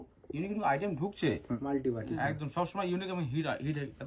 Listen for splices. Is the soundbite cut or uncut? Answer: cut